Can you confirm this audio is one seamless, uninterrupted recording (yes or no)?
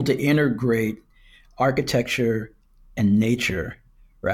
yes